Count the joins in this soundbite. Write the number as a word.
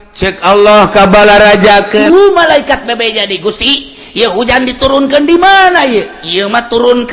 one